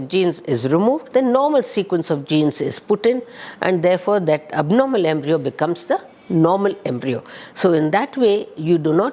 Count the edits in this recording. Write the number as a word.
one